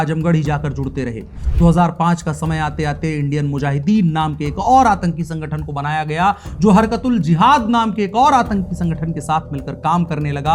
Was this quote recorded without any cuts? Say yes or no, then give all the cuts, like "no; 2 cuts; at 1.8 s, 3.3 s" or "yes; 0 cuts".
yes; 0 cuts